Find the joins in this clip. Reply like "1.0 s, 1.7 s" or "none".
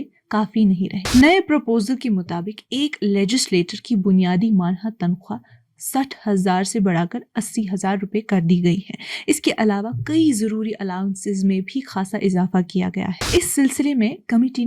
1.0 s, 13.2 s